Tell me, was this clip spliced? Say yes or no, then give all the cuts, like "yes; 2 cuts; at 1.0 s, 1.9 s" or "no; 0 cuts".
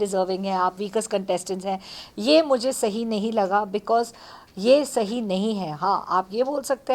no; 0 cuts